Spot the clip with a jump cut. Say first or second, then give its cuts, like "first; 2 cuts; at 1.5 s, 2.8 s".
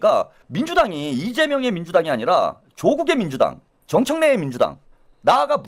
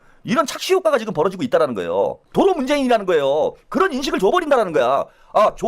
second; 1 cut; at 2.2 s